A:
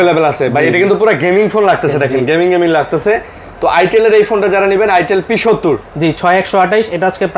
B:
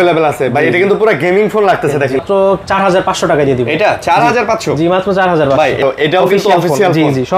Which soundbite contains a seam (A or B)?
B